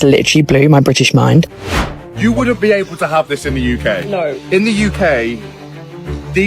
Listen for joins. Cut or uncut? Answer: cut